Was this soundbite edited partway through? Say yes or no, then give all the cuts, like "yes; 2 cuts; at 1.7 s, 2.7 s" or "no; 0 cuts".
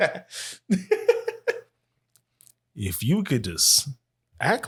no; 0 cuts